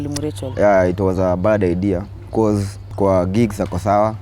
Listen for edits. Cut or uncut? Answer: cut